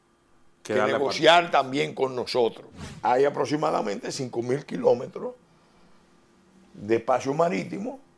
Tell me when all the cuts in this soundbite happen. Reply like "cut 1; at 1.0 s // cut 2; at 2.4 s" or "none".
cut 1; at 2.7 s